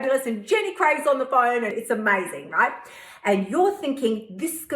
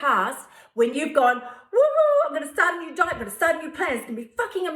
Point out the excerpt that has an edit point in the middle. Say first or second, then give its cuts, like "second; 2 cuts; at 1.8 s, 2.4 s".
first; 1 cut; at 1.7 s